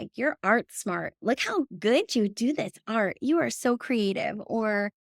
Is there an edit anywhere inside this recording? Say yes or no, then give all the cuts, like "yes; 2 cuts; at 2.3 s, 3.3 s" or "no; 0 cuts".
yes; 1 cut; at 1.1 s